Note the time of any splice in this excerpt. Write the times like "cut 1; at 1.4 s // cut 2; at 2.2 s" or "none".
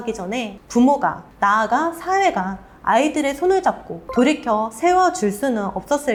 none